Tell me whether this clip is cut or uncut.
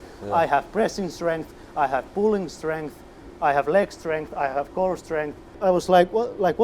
cut